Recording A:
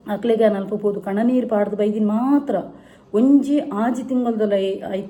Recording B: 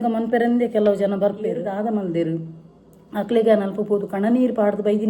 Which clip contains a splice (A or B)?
B